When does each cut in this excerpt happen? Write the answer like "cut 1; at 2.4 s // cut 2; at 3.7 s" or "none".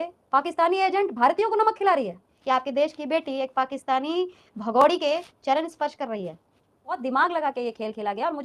cut 1; at 2.3 s // cut 2; at 7.0 s